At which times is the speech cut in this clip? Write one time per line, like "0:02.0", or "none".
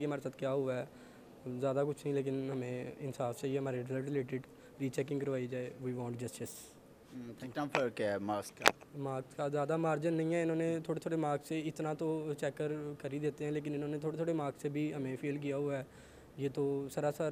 none